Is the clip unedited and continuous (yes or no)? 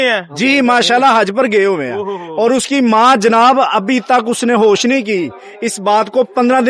yes